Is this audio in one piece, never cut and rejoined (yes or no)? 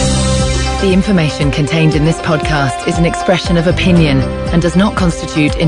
yes